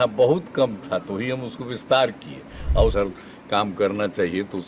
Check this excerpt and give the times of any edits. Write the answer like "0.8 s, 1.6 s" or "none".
2.9 s

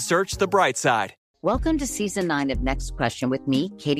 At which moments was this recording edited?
1.2 s

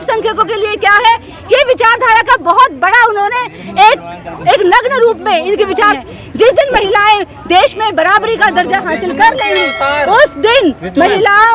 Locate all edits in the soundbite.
5.9 s

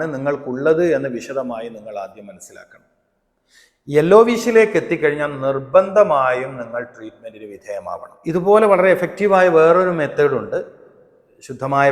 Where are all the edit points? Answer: 8.1 s

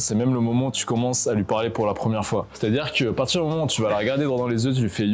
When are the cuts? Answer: 2.5 s

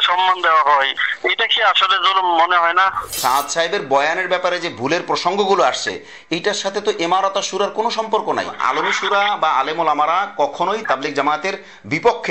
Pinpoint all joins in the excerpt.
3.2 s, 8.6 s

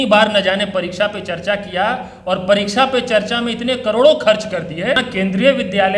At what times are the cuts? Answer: 5.0 s

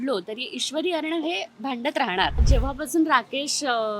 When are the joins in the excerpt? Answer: 2.4 s

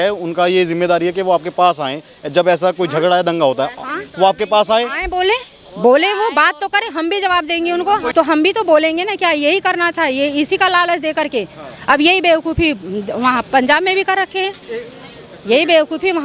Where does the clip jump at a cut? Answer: 8.1 s

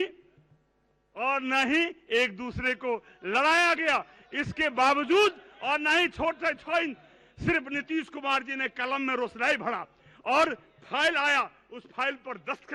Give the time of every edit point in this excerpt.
none

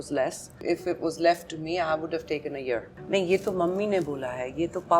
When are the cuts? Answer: 2.9 s

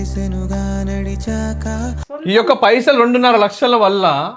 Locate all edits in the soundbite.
2.1 s

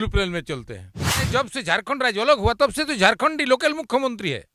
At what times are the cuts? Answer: 1.1 s

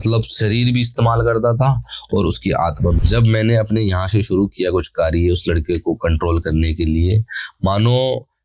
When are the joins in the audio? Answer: 3.0 s

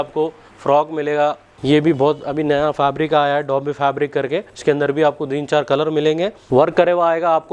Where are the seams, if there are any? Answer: 1.5 s, 4.5 s, 6.4 s

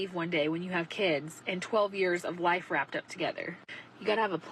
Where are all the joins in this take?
2.2 s

